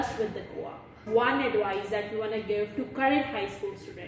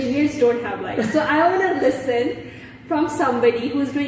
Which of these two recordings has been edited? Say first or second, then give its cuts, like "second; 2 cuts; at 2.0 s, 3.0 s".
first; 1 cut; at 1.0 s